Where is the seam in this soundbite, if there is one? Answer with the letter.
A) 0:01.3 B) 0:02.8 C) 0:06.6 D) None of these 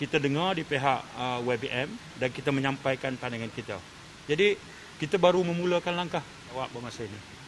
C